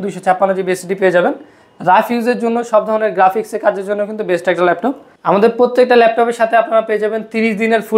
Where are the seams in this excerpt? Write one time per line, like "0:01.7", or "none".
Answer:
0:05.1

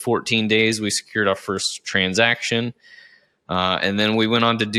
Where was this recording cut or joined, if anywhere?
none

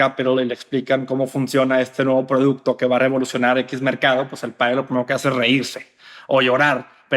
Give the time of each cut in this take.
none

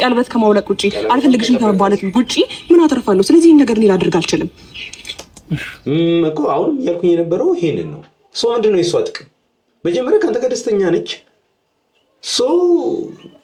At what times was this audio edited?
none

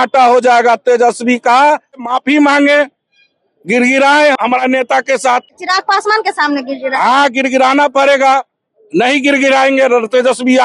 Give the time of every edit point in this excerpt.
0:02.0
0:04.4
0:05.6

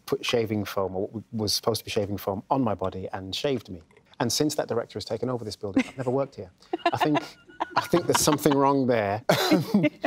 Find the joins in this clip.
0:09.2

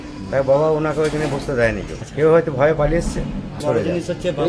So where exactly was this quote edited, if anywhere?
0:01.9
0:03.6

